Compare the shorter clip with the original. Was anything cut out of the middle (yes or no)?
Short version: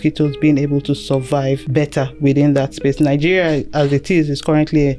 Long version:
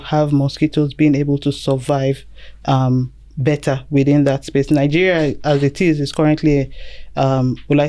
yes